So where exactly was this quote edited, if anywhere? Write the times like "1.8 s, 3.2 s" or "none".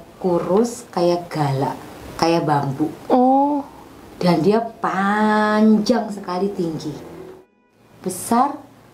7.5 s